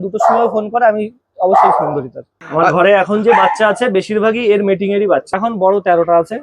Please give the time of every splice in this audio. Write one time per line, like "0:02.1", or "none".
0:01.9
0:05.3